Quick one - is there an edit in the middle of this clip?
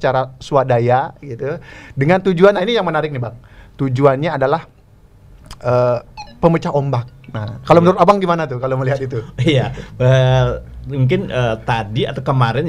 no; 0 cuts

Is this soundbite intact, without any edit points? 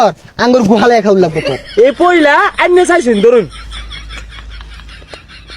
no; 1 cut; at 1.5 s

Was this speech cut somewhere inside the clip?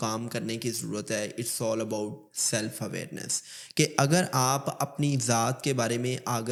no; 0 cuts

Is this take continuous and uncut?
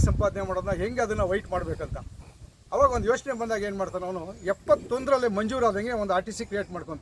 yes; 0 cuts

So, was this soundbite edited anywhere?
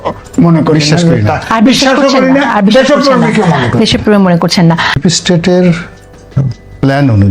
yes; 1 cut; at 5.0 s

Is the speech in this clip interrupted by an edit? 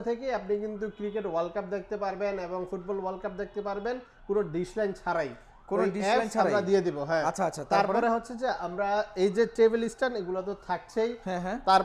no; 0 cuts

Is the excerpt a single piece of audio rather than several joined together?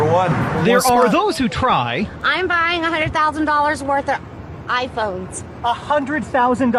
yes; 0 cuts

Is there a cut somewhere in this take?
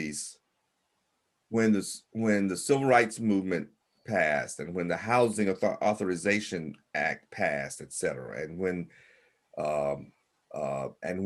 no; 0 cuts

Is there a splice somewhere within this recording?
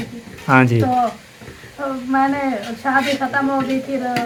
no; 0 cuts

